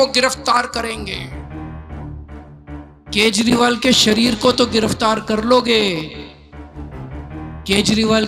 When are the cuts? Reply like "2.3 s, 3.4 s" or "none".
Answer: 1.5 s, 3.1 s